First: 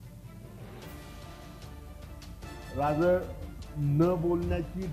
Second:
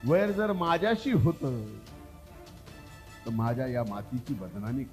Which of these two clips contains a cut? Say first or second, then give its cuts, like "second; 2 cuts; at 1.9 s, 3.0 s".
first; 1 cut; at 2.2 s